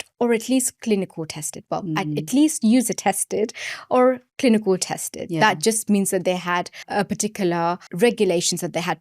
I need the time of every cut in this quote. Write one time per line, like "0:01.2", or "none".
0:06.9
0:07.9